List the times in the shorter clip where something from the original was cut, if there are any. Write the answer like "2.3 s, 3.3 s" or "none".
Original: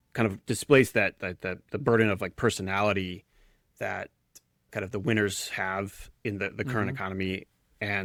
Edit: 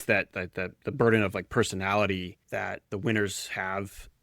2.9 s